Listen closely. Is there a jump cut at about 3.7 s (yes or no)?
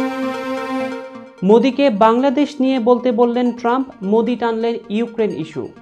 no